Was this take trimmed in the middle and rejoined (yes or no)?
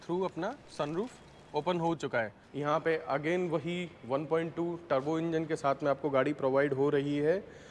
yes